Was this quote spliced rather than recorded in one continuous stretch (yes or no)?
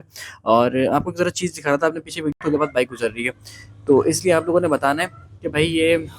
yes